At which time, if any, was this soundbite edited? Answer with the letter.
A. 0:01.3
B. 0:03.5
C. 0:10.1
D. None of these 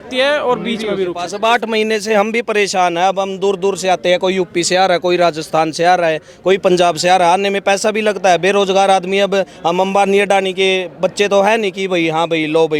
A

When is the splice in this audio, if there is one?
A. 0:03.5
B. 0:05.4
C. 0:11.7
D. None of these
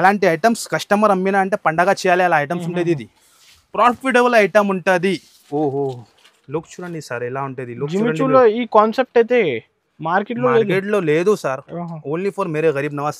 B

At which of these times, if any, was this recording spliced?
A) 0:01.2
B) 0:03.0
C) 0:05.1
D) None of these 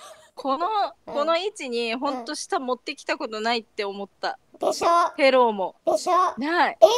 D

